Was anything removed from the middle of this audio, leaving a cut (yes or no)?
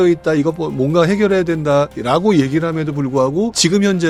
no